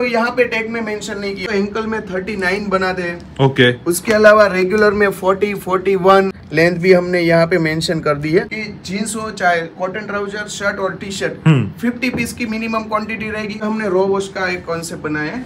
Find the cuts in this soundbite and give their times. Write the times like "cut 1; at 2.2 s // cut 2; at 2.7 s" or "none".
cut 1; at 1.4 s // cut 2; at 6.4 s // cut 3; at 8.5 s // cut 4; at 13.6 s